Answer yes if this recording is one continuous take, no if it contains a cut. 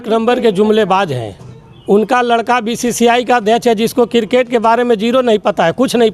yes